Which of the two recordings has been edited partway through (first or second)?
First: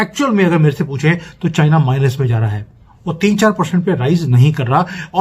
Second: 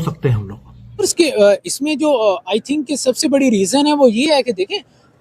second